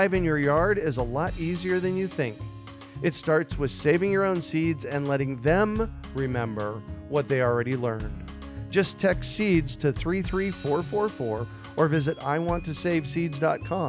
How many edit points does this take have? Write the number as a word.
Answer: zero